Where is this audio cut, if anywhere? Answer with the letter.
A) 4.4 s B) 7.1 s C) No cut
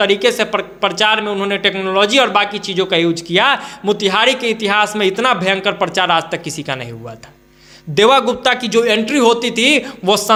C